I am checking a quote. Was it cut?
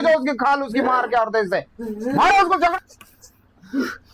yes; 1 cut; at 2.7 s

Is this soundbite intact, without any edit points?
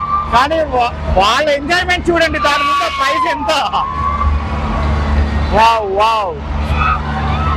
yes; 0 cuts

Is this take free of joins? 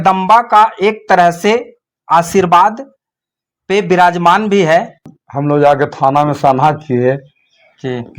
no; 1 cut; at 5.1 s

